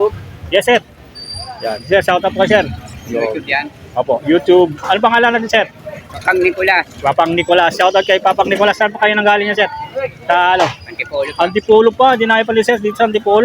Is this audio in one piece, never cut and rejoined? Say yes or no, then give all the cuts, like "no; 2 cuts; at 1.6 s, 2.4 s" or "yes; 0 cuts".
no; 1 cut; at 6.1 s